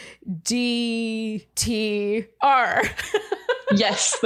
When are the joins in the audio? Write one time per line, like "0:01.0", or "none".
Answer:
0:01.5